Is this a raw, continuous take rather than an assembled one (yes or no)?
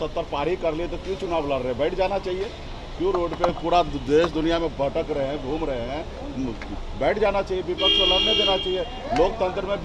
yes